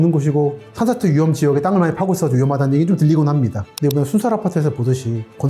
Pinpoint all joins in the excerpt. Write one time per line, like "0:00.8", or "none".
0:03.7